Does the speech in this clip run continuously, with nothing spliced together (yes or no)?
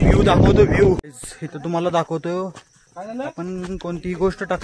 no